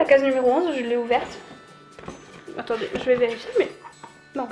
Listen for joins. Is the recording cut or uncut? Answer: uncut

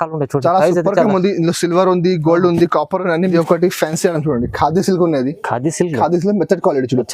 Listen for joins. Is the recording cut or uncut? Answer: cut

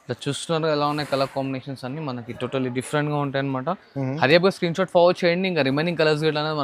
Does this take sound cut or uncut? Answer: uncut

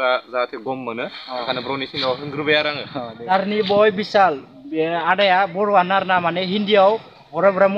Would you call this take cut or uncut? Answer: cut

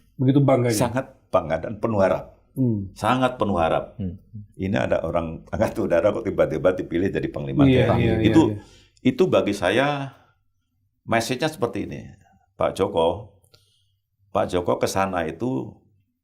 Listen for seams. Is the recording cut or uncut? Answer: uncut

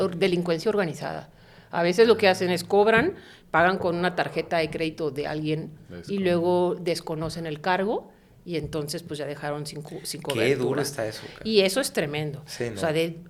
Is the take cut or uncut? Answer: uncut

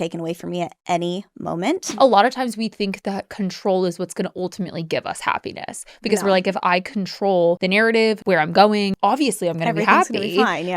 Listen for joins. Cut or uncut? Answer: cut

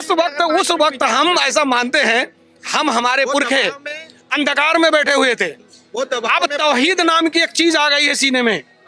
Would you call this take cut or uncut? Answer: uncut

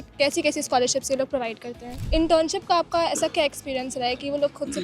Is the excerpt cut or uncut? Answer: cut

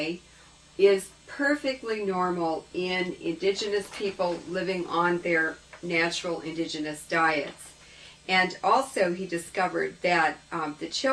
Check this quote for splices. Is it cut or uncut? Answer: uncut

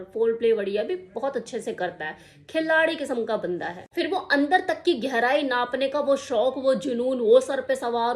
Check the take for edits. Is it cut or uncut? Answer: cut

